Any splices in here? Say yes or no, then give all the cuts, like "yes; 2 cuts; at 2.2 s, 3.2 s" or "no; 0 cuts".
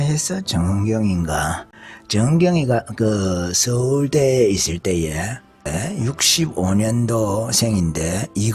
no; 0 cuts